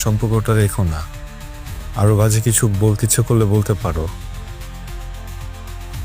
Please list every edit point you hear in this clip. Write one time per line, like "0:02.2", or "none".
none